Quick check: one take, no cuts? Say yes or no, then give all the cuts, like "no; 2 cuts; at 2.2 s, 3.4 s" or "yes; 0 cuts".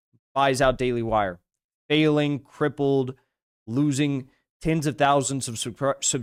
yes; 0 cuts